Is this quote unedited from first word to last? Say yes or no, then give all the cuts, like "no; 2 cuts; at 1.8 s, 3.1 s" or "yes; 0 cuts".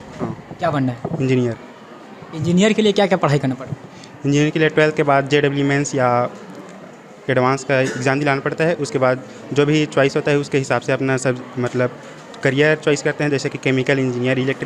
yes; 0 cuts